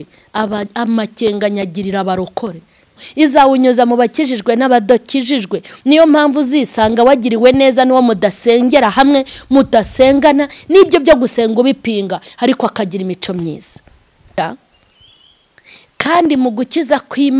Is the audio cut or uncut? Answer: cut